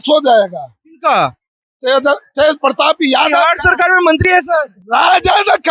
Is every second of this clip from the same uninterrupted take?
yes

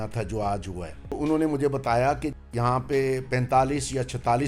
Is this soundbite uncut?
no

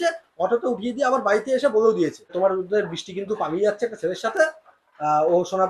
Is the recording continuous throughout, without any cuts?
no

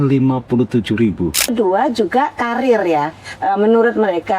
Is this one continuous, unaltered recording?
no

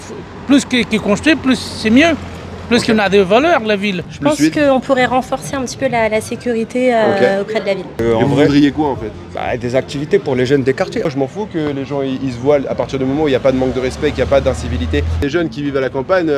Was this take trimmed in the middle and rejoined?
yes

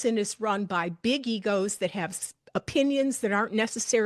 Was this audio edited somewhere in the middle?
no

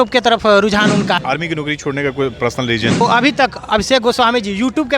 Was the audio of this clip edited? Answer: yes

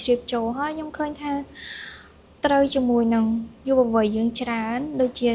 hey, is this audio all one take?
yes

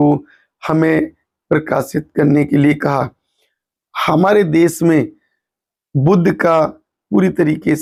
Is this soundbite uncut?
yes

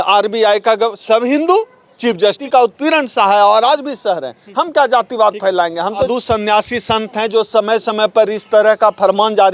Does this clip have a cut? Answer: yes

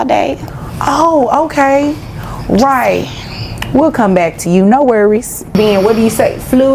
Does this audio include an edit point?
yes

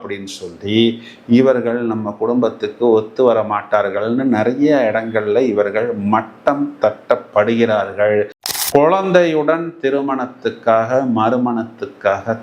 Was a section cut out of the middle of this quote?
yes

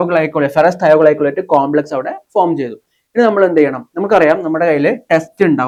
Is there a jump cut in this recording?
no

